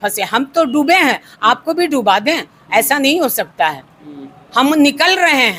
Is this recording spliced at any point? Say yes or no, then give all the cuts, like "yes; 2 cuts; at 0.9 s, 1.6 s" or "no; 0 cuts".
no; 0 cuts